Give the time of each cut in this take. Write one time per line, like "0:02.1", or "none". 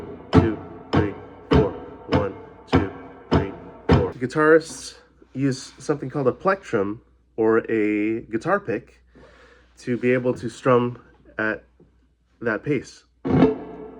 0:04.1